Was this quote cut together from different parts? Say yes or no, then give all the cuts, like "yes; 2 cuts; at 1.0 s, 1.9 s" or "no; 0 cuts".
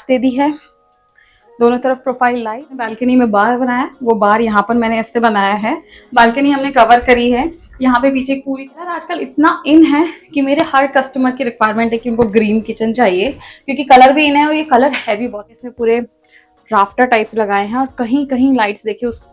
yes; 3 cuts; at 2.9 s, 8.9 s, 15.3 s